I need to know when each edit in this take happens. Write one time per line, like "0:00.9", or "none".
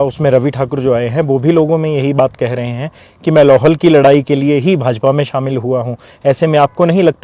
none